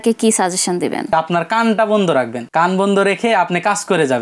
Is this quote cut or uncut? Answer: cut